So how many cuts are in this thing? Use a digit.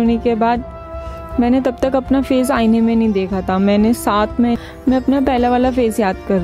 1